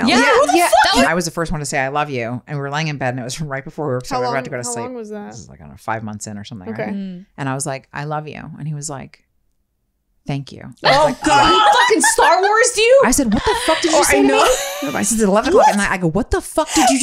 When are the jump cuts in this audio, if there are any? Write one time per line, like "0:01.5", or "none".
0:01.1